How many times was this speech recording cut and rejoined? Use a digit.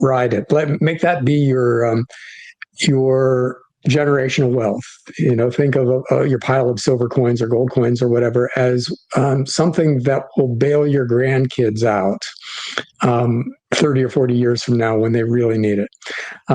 1